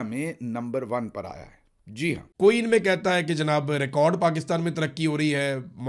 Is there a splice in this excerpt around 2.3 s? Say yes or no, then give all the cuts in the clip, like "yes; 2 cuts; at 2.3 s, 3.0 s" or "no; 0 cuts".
yes; 1 cut; at 2.3 s